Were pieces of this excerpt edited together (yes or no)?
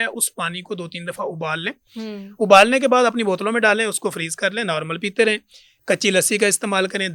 no